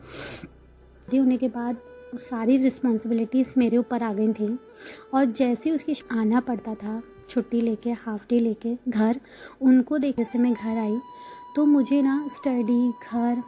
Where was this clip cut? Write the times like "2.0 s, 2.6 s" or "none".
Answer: 1.0 s, 6.0 s, 10.2 s

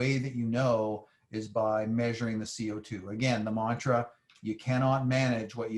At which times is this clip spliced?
none

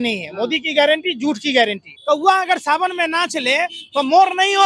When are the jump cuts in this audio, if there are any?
1.9 s

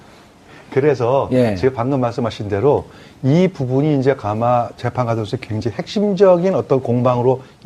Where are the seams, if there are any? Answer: 5.1 s

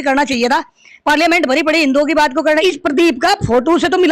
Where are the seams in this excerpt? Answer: 2.6 s

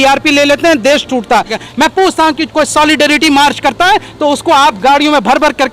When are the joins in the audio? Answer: 1.6 s

